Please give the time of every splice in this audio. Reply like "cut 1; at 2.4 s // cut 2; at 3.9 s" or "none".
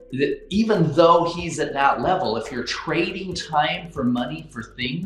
none